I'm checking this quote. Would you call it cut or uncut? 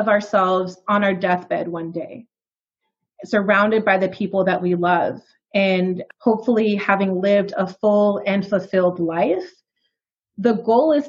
uncut